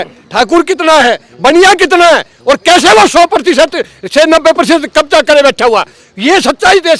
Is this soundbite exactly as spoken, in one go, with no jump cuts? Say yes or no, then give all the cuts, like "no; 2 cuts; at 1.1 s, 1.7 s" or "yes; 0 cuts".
yes; 0 cuts